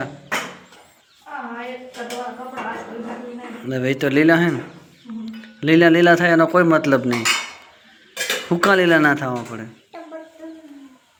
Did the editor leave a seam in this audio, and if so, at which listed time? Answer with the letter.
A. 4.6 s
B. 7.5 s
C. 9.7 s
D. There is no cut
D